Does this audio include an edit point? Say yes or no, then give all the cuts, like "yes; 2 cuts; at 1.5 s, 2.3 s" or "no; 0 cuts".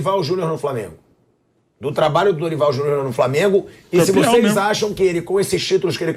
no; 0 cuts